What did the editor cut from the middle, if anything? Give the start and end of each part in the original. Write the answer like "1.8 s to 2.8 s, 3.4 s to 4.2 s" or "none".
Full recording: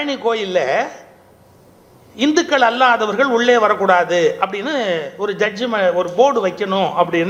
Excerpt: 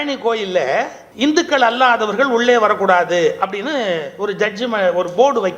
1.0 s to 2.0 s